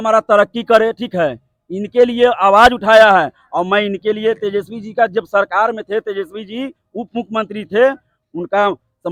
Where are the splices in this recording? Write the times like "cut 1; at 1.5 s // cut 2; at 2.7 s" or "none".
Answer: none